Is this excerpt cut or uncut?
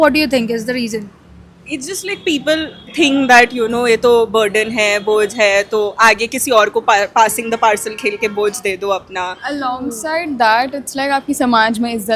uncut